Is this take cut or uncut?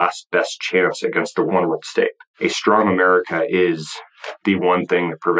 cut